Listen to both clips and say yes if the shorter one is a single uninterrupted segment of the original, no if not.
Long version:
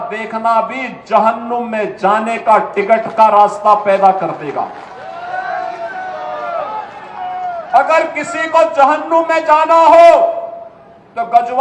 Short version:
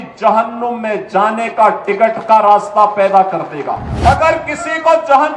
no